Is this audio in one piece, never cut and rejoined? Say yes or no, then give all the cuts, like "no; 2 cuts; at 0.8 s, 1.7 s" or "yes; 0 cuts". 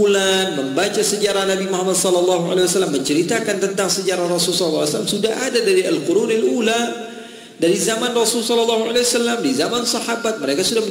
yes; 0 cuts